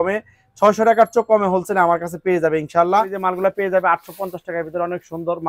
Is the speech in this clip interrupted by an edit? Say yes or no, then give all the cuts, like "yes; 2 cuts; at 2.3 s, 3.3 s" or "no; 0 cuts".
yes; 1 cut; at 3.1 s